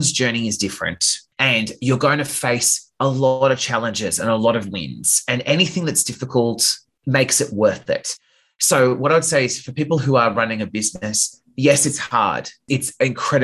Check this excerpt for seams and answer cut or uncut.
cut